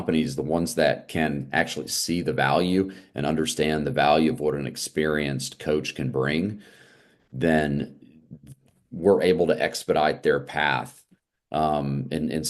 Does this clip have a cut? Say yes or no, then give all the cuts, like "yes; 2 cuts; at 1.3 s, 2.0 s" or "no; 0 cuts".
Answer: no; 0 cuts